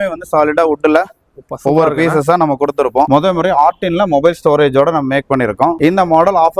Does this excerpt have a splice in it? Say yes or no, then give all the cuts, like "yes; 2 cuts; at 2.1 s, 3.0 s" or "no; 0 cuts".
yes; 2 cuts; at 3.1 s, 5.8 s